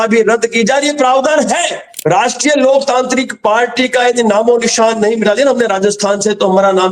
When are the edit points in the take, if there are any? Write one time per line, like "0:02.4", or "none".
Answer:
0:01.9